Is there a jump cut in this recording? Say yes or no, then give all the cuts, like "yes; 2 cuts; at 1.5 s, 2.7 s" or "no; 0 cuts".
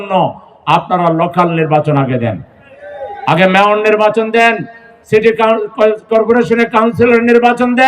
no; 0 cuts